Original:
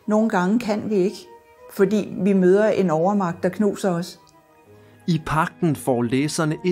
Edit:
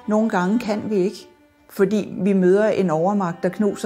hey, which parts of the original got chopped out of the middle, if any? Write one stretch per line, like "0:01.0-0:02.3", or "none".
none